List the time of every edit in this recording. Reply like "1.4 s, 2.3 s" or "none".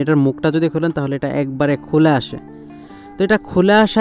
none